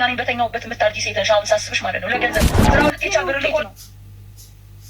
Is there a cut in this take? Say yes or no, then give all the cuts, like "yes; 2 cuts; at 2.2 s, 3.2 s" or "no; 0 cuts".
yes; 1 cut; at 3.6 s